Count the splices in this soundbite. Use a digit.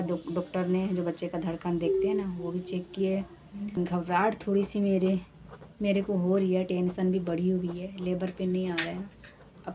1